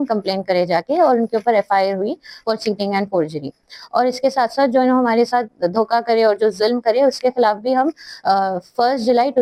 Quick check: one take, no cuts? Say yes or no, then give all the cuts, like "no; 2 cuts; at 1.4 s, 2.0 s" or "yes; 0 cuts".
yes; 0 cuts